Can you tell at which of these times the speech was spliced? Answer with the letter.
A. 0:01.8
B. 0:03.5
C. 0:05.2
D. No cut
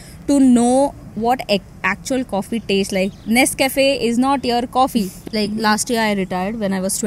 C